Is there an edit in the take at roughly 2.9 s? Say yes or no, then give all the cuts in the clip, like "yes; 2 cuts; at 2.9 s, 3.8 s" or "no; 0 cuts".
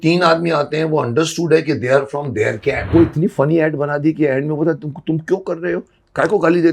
yes; 1 cut; at 2.9 s